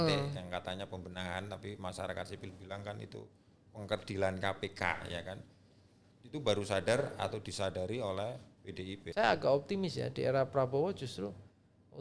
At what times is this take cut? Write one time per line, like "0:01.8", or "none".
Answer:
0:08.9